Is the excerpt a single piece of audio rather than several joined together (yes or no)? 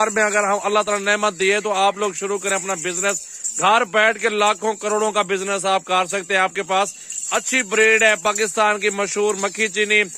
yes